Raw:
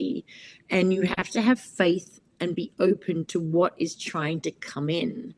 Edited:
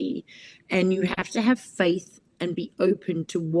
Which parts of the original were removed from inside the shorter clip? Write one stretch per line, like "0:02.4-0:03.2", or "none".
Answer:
none

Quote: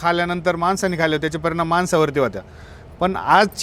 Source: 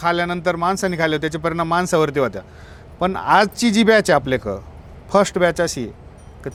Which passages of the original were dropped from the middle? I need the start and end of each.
none

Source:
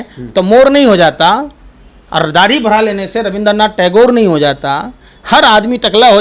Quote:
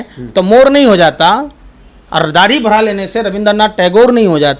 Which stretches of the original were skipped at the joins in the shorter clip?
none

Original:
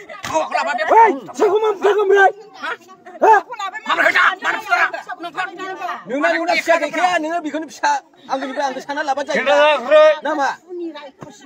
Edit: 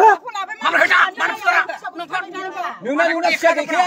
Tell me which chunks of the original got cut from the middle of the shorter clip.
none

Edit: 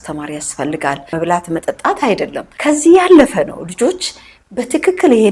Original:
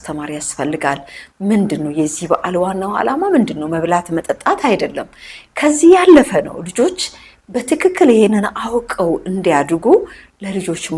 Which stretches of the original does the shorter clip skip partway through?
0:01.1-0:03.7
0:05.1-0:05.4

